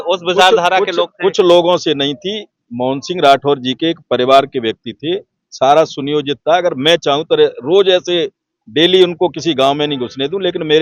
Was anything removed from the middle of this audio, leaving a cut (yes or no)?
no